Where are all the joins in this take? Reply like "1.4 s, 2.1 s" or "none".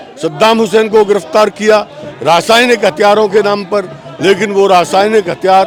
none